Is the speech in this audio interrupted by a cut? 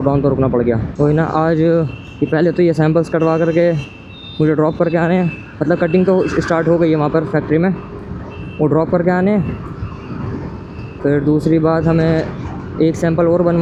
no; 0 cuts

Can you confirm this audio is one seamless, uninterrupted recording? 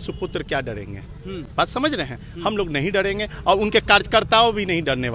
yes; 0 cuts

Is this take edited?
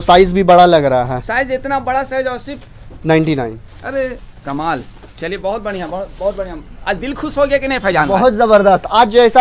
no; 0 cuts

